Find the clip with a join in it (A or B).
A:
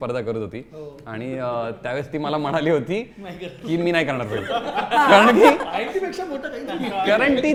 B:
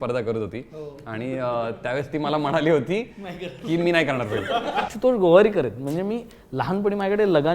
B